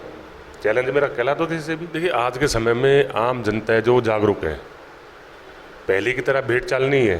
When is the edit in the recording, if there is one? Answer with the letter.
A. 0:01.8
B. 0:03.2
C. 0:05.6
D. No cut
A